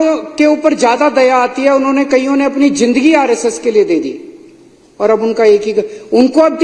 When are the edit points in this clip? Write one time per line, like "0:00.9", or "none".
none